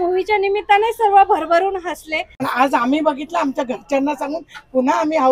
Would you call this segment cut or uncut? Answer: cut